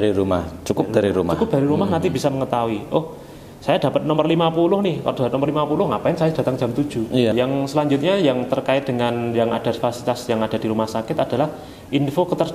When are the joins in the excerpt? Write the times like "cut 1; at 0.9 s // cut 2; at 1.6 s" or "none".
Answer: cut 1; at 7.3 s